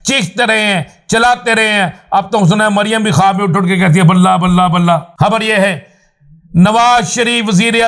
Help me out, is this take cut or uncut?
cut